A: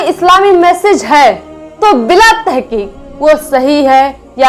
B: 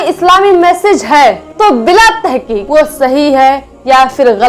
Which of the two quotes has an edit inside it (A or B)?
B